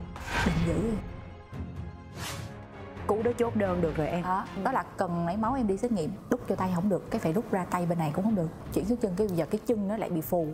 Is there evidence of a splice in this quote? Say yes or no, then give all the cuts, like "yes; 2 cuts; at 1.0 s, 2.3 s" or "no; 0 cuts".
yes; 4 cuts; at 2.2 s, 4.6 s, 6.2 s, 8.6 s